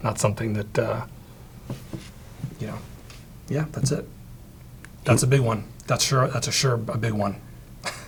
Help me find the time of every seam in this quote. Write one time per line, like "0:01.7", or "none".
none